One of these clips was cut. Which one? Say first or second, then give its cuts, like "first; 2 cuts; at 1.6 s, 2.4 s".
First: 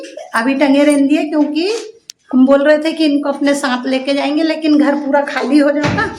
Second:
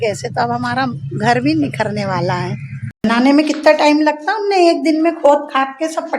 second; 1 cut; at 3.0 s